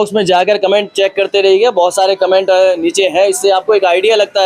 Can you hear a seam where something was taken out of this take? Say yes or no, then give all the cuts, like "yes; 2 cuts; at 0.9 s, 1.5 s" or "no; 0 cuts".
no; 0 cuts